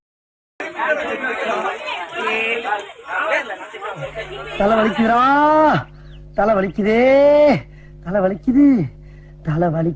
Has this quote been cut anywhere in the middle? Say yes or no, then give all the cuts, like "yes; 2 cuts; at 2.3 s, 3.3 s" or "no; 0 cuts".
no; 0 cuts